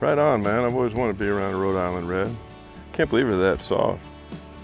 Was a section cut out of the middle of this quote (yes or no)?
no